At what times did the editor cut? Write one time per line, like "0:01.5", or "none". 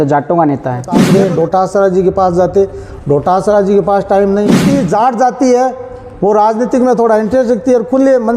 0:01.0
0:04.6